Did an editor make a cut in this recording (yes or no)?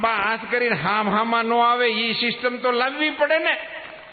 no